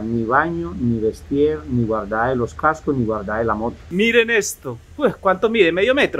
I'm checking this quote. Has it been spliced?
yes; 1 cut; at 3.8 s

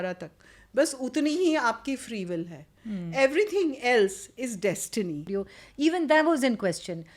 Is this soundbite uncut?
no; 1 cut; at 5.3 s

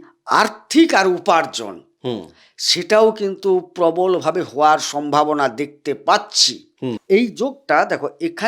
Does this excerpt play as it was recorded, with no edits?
no; 1 cut; at 7.0 s

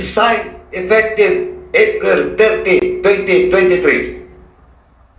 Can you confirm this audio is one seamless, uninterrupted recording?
yes; 0 cuts

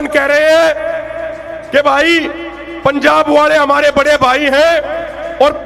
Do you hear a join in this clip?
no; 0 cuts

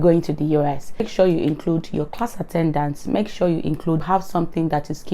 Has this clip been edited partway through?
yes; 2 cuts; at 1.1 s, 4.0 s

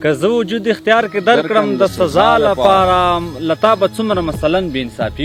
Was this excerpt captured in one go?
yes; 0 cuts

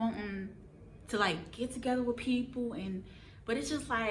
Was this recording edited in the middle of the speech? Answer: no; 0 cuts

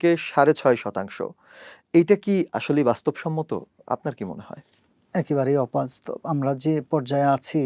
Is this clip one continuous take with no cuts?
yes; 0 cuts

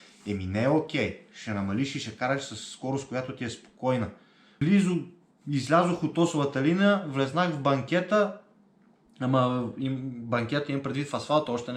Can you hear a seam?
yes; 1 cut; at 4.4 s

